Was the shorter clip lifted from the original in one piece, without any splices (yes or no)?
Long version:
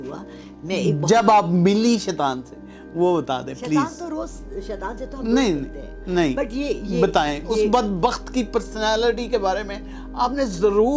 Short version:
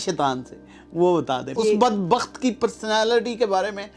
no